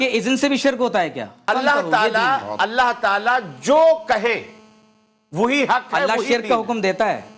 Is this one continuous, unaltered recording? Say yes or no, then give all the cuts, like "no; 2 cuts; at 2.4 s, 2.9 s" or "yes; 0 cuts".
no; 1 cut; at 1.5 s